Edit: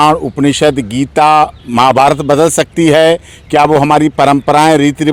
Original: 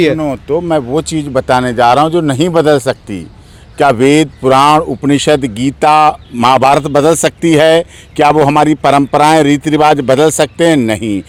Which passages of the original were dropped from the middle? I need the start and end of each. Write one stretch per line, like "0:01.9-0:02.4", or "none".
none

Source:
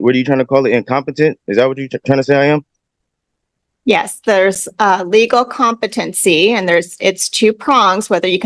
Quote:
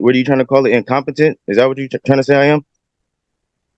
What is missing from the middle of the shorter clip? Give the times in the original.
none

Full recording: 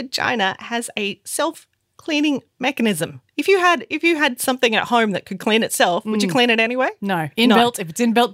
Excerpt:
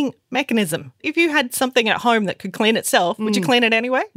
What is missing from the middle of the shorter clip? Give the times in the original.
0:03.3-0:03.9

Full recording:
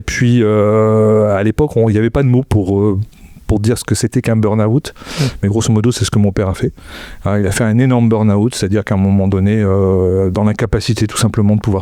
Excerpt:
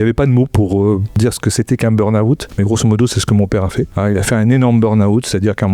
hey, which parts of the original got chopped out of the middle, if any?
0:03.1-0:03.6
0:04.9-0:05.3
0:06.8-0:07.2

